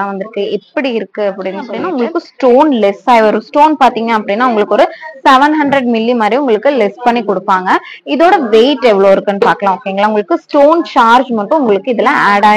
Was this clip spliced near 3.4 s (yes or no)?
no